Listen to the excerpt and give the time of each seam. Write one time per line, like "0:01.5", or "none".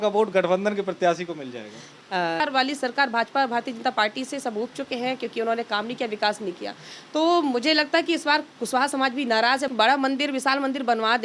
0:02.4
0:09.7